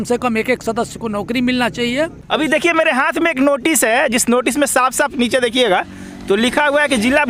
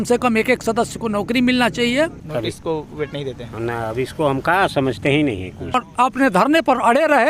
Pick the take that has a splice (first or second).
second